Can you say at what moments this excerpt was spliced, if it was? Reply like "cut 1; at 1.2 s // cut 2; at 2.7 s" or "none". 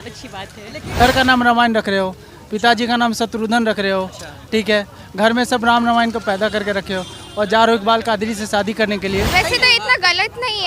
cut 1; at 1.0 s // cut 2; at 9.3 s